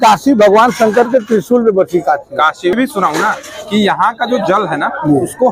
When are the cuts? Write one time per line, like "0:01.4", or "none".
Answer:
0:02.8